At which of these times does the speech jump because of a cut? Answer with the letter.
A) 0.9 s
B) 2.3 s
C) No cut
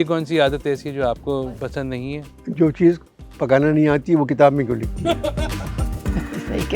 B